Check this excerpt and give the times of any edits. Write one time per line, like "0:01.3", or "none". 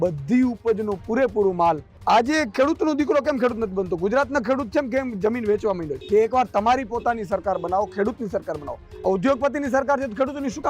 0:01.9
0:05.9